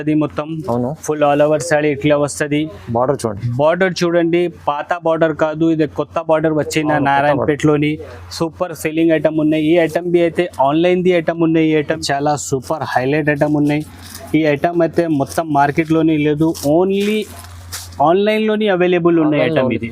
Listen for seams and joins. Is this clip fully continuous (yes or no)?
no